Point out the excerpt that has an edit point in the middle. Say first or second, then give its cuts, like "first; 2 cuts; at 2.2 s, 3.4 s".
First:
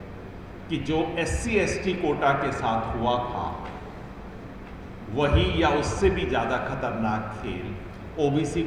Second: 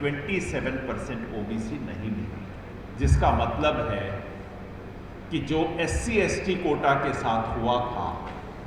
second; 1 cut; at 2.7 s